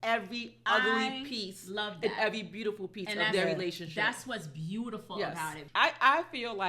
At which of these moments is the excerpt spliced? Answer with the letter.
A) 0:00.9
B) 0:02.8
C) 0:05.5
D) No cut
C